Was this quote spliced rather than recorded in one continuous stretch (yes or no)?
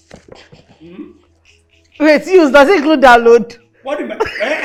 no